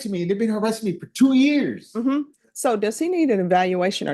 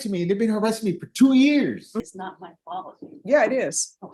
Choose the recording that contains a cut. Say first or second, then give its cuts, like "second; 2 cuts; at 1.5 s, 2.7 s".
second; 1 cut; at 1.9 s